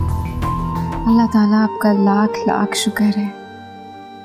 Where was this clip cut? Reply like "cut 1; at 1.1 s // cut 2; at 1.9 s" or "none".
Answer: cut 1; at 0.9 s